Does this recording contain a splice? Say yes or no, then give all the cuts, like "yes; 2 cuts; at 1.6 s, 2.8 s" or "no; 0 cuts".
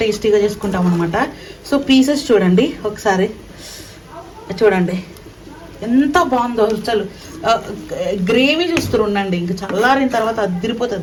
no; 0 cuts